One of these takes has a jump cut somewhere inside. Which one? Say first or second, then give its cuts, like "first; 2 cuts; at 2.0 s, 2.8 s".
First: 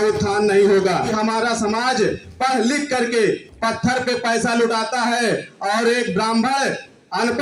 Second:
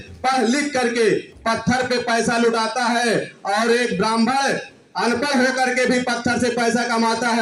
first; 1 cut; at 1.1 s